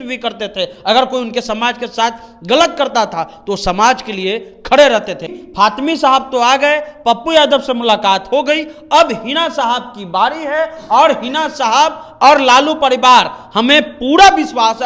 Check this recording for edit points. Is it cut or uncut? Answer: cut